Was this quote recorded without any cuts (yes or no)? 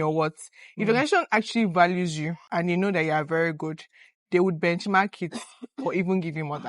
no